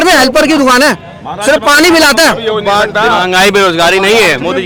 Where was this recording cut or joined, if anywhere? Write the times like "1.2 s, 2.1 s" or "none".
none